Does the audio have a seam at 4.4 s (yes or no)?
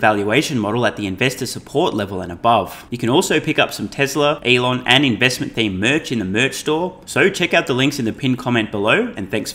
yes